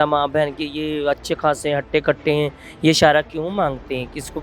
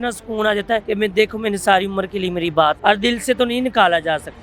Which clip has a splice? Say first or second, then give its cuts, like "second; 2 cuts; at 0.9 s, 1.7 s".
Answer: second; 2 cuts; at 0.8 s, 2.8 s